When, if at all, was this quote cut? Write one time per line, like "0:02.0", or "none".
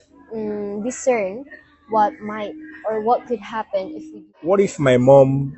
0:04.3